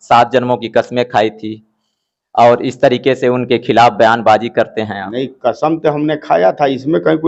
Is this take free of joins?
yes; 0 cuts

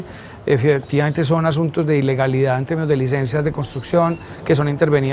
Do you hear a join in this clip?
no; 0 cuts

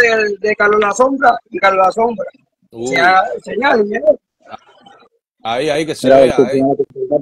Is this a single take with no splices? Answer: yes; 0 cuts

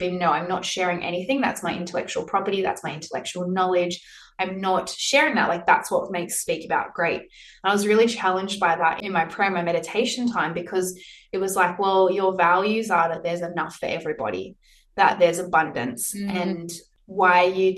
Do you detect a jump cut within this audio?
yes; 2 cuts; at 9.0 s, 16.8 s

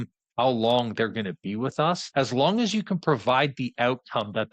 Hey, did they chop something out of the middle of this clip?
yes; 1 cut; at 2.0 s

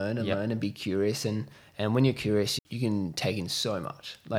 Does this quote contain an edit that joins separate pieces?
yes; 1 cut; at 2.5 s

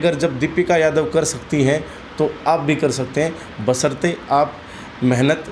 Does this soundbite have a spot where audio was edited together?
no; 0 cuts

